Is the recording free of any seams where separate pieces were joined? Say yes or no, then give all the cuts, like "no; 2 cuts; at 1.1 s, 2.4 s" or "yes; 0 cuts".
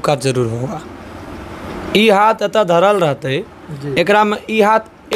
yes; 0 cuts